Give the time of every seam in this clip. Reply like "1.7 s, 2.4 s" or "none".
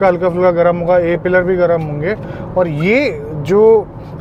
none

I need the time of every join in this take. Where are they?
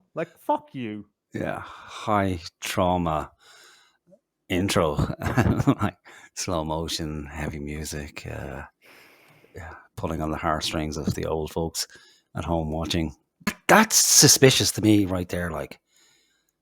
13.6 s

